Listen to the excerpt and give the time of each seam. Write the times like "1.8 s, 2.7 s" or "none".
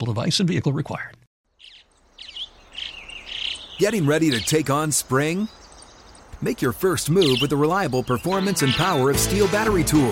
1.2 s